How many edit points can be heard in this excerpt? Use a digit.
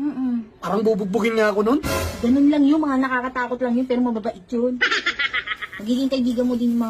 0